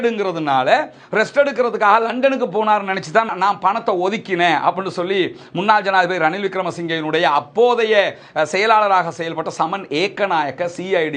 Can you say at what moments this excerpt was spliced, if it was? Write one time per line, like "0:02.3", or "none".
none